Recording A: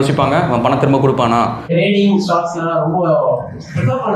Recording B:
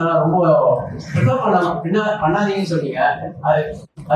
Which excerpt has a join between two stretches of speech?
A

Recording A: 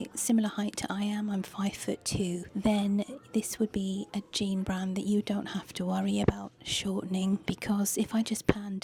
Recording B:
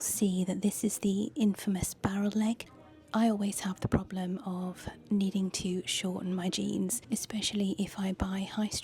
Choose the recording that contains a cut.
B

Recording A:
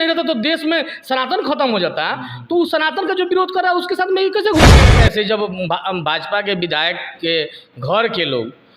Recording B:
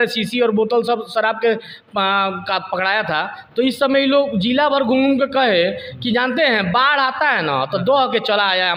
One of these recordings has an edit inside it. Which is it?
A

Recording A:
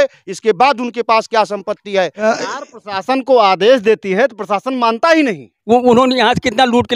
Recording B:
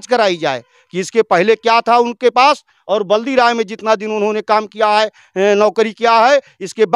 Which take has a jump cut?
A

